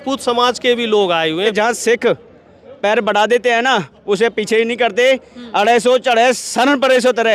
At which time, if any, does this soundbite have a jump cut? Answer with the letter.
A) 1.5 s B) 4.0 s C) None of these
A